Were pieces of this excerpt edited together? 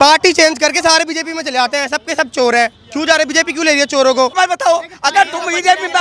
yes; 1 cut; at 4.3 s

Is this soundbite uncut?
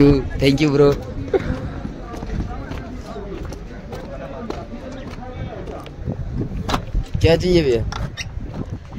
yes; 0 cuts

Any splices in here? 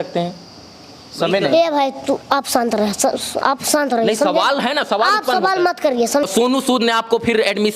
yes; 1 cut; at 6.2 s

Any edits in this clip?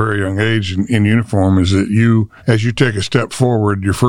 no; 0 cuts

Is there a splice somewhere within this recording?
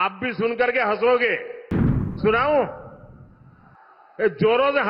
no; 0 cuts

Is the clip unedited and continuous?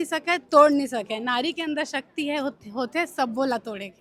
yes; 0 cuts

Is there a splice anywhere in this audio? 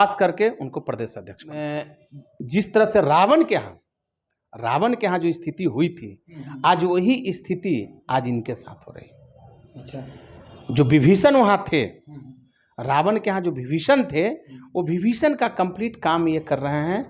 yes; 1 cut; at 1.5 s

